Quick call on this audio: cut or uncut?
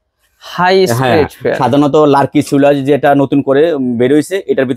uncut